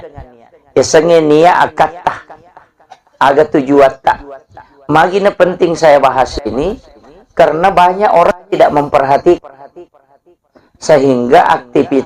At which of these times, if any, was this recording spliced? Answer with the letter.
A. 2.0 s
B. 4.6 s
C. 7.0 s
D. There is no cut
D